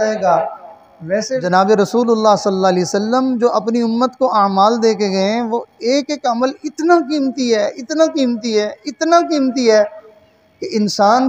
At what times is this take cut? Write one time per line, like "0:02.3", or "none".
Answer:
0:01.4